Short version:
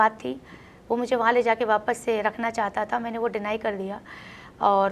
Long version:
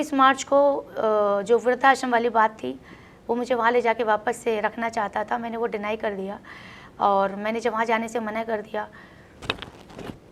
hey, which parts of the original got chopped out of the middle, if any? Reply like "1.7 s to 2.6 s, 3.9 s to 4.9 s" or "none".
none